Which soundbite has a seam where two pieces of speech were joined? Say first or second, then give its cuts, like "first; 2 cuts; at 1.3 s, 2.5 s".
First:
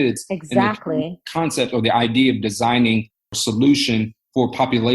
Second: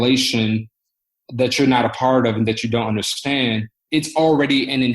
first; 2 cuts; at 1.2 s, 3.4 s